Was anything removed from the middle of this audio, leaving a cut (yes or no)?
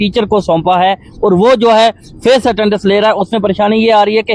no